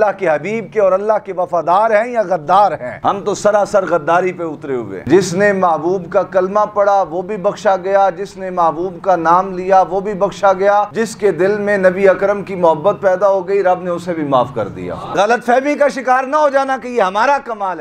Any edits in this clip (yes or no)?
yes